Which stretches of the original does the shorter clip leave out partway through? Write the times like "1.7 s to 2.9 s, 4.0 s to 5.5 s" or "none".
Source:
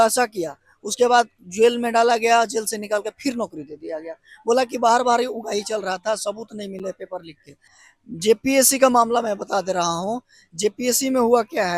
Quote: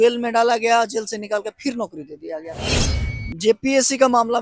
4.3 s to 7.5 s